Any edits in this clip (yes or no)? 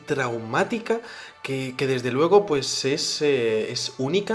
yes